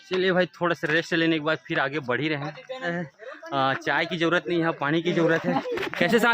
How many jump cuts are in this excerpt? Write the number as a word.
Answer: one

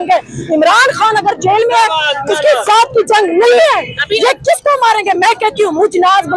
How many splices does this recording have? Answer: zero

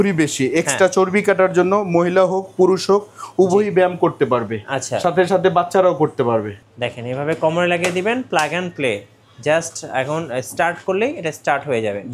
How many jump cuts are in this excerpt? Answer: one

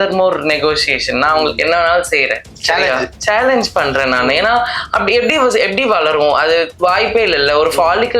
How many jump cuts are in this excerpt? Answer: two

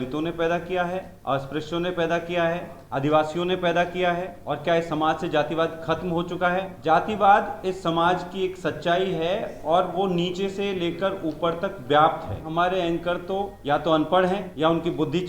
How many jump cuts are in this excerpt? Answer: seven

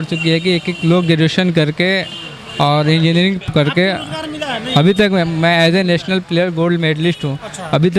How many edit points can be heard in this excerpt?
zero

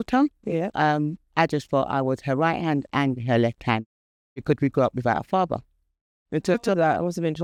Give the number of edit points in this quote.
zero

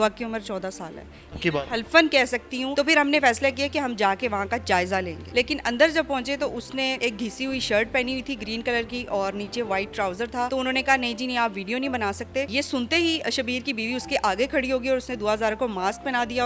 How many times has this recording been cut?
five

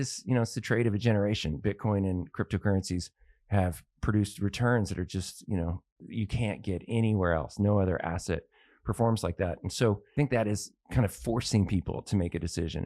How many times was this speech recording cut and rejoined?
two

